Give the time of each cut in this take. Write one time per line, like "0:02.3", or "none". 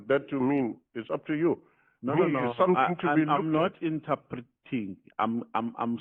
none